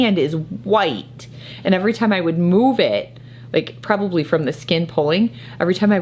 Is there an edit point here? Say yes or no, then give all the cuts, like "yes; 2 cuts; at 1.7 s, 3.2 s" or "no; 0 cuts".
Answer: no; 0 cuts